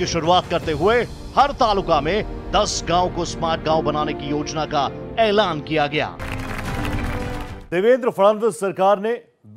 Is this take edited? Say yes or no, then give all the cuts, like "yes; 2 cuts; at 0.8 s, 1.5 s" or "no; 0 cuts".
yes; 2 cuts; at 5.0 s, 6.3 s